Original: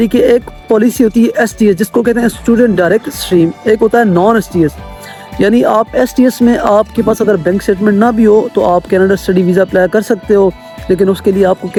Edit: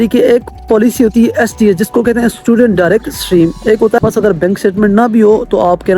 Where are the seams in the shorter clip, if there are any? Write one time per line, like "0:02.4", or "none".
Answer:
0:04.0